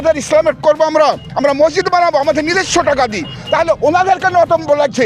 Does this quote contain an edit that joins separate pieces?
no; 0 cuts

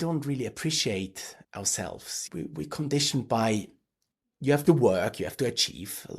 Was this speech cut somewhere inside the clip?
no; 0 cuts

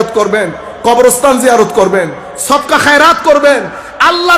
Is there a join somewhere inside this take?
no; 0 cuts

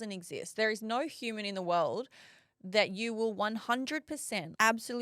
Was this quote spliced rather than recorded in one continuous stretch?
no; 0 cuts

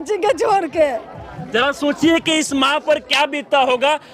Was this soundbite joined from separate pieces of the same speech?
no; 0 cuts

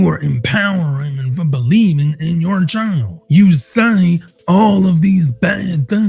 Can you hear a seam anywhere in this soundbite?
yes; 1 cut; at 3.1 s

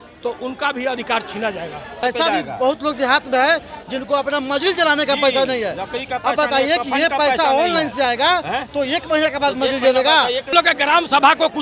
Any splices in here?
yes; 2 cuts; at 2.0 s, 10.5 s

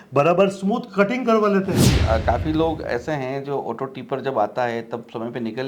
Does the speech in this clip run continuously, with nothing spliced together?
no; 1 cut; at 1.8 s

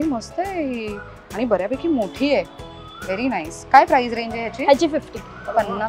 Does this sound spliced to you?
no; 0 cuts

